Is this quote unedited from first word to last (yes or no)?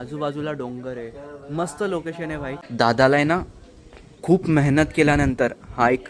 no